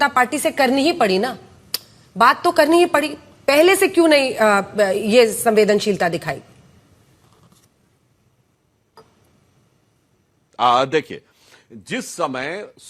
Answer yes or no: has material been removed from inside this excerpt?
no